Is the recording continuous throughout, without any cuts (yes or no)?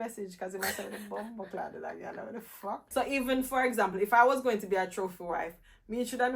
no